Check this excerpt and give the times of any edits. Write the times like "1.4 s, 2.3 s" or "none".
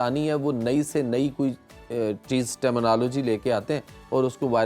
none